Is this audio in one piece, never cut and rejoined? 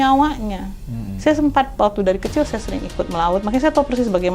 yes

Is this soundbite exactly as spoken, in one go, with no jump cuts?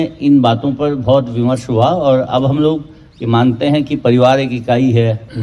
yes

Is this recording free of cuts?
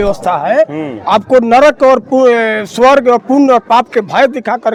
yes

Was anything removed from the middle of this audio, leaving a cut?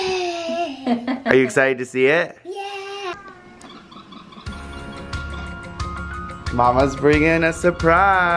yes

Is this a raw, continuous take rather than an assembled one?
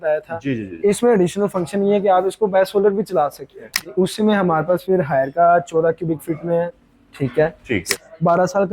no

